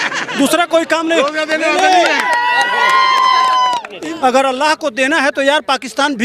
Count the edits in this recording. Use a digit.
1